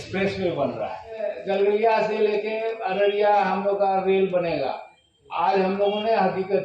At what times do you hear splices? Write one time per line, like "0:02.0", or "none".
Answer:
0:01.4